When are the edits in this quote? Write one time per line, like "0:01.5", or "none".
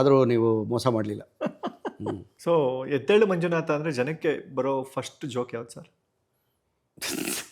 0:02.3